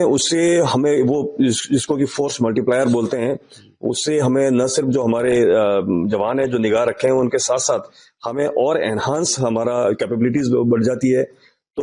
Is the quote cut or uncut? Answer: uncut